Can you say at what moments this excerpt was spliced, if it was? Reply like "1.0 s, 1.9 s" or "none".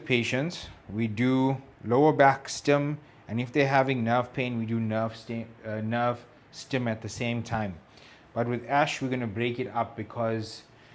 none